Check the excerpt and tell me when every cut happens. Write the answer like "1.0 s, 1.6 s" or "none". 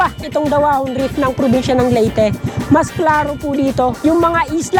none